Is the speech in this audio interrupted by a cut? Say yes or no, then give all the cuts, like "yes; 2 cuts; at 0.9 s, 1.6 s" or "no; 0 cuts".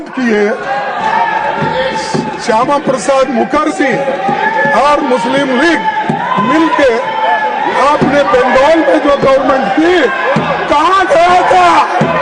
no; 0 cuts